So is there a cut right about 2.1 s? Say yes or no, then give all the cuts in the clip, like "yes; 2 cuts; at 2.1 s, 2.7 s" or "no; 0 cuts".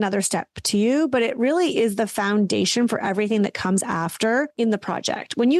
no; 1 cut; at 4.5 s